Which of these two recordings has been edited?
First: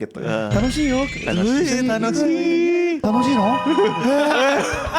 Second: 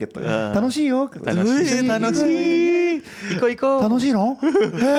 first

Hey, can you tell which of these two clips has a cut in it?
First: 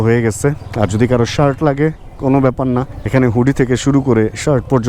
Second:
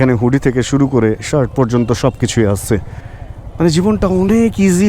second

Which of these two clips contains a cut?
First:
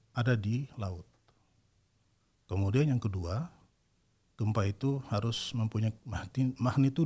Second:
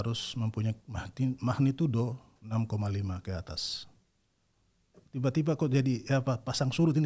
second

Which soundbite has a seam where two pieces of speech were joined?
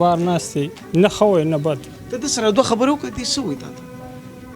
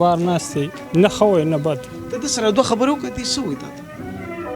second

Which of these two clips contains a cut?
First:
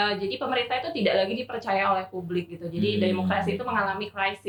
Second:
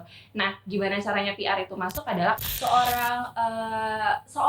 second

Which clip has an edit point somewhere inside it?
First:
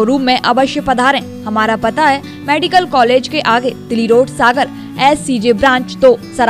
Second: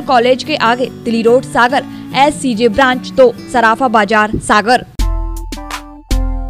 second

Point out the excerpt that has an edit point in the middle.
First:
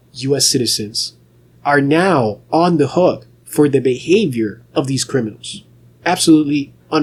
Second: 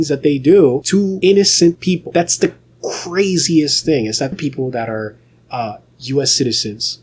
second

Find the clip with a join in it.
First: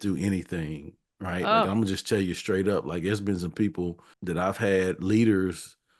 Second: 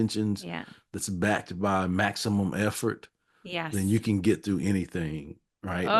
first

